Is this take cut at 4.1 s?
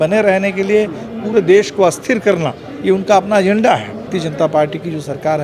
yes; 1 cut; at 4.1 s

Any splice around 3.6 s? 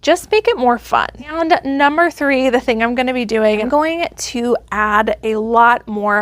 yes; 2 cuts; at 1.2 s, 3.6 s

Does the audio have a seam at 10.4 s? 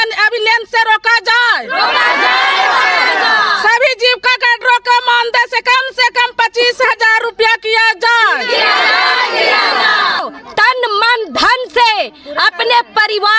yes; 1 cut; at 10.4 s

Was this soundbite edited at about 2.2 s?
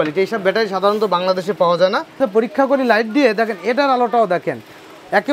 yes; 1 cut; at 2.2 s

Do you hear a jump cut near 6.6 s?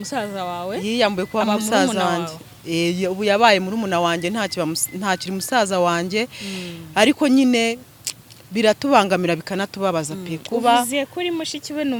no; 0 cuts

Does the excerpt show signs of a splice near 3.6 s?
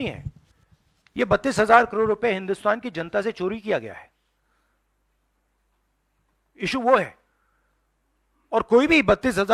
no; 0 cuts

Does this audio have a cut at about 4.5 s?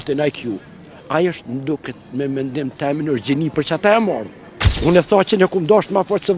yes; 1 cut; at 4.5 s

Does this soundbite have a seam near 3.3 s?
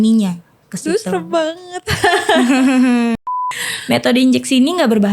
yes; 1 cut; at 3.3 s

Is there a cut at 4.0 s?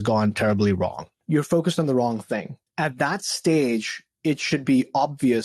no; 2 cuts; at 1.1 s, 2.6 s

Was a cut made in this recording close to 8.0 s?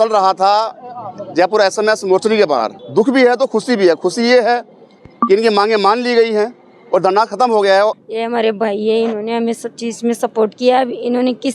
yes; 2 cuts; at 2.8 s, 8.0 s

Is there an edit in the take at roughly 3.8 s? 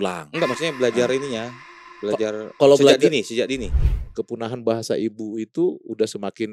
yes; 1 cut; at 3.8 s

